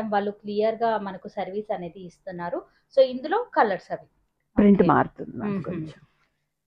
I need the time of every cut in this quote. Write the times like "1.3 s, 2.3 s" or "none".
none